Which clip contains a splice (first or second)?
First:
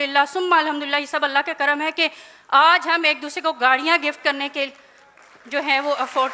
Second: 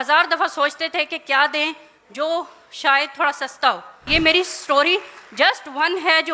second